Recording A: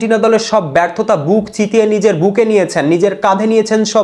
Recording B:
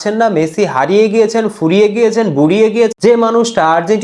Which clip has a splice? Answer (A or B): B